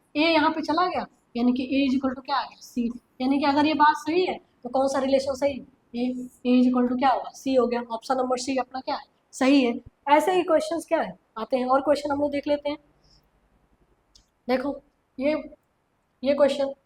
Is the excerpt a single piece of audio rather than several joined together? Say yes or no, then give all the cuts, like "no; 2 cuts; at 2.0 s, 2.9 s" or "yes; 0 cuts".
yes; 0 cuts